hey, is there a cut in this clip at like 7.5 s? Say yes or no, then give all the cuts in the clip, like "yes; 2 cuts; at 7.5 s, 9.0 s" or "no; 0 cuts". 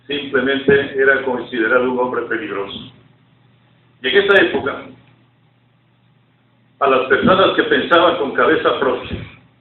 yes; 1 cut; at 7.5 s